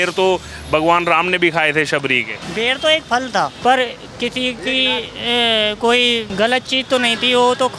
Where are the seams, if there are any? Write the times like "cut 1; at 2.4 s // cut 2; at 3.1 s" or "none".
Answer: cut 1; at 2.4 s // cut 2; at 3.6 s // cut 3; at 6.3 s